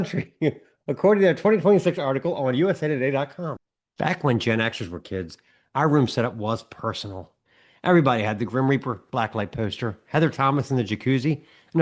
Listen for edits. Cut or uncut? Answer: cut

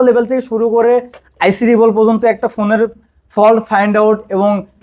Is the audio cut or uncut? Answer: uncut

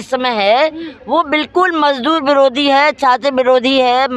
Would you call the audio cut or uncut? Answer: uncut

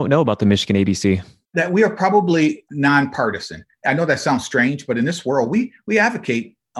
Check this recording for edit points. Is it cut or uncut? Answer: cut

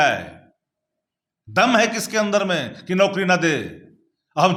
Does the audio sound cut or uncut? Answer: uncut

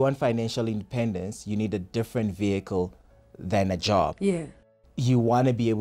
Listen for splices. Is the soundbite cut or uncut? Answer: uncut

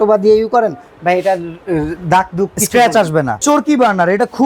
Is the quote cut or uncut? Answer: cut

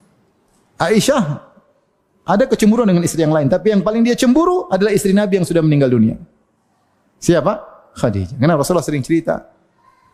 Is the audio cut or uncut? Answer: uncut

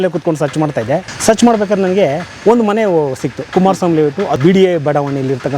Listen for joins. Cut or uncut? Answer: cut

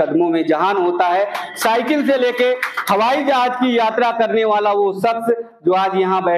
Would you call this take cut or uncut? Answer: uncut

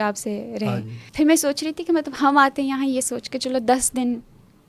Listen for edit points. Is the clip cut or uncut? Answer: cut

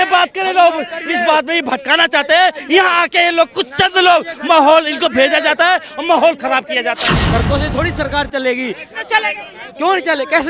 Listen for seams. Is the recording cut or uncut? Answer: cut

